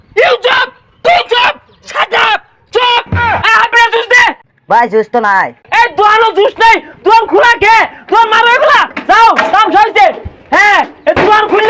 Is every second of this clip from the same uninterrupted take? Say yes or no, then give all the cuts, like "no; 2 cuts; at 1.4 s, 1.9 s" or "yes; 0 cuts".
no; 2 cuts; at 4.4 s, 5.6 s